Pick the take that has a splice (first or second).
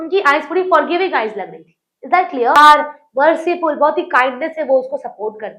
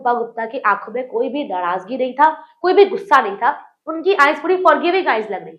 first